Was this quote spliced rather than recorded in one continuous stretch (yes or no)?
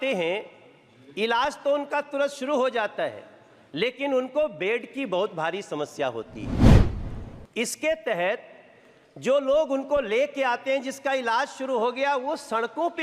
no